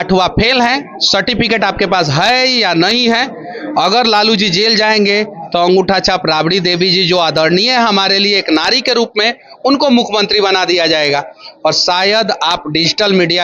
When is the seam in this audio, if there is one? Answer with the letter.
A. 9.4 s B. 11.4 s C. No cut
C